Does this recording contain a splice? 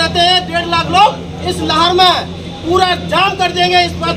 no; 0 cuts

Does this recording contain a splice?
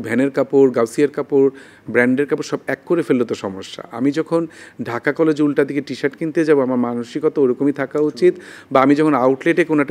no; 0 cuts

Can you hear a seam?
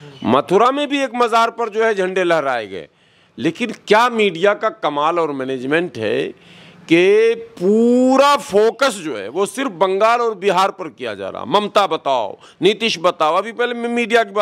no; 0 cuts

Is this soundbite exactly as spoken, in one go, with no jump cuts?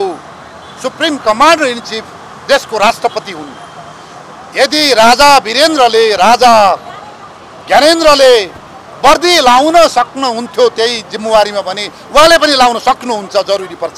yes; 0 cuts

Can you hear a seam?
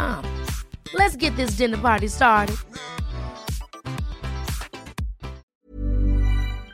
yes; 1 cut; at 5.4 s

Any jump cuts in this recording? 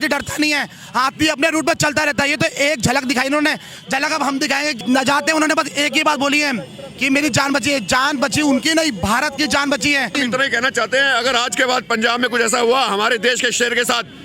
yes; 2 cuts; at 4.7 s, 10.1 s

